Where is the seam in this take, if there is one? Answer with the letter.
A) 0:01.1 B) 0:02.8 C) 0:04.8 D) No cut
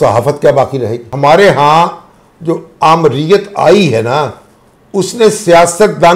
A